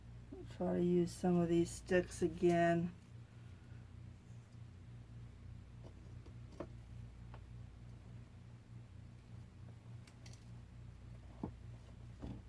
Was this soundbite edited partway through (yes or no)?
no